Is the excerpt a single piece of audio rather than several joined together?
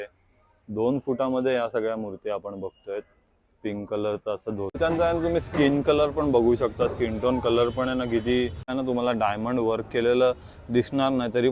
no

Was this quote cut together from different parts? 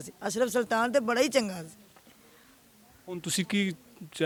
no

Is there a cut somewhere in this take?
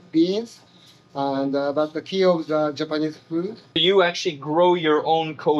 yes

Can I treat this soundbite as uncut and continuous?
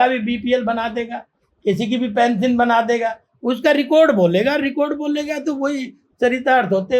yes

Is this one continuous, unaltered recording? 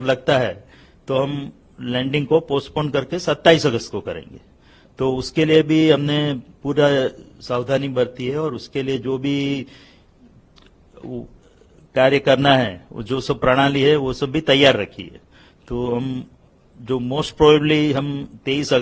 yes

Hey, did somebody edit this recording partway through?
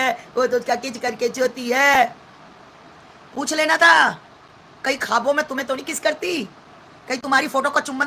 no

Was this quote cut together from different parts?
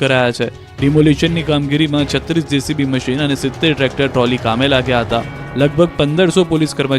yes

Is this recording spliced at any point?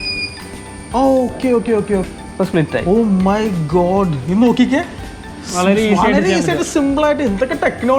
yes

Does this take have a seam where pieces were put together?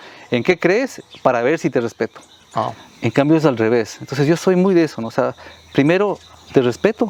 no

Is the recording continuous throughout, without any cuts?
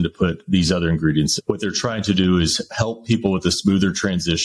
no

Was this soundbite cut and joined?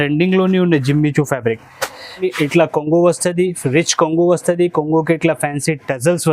yes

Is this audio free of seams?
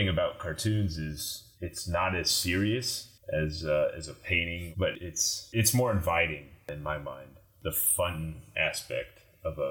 no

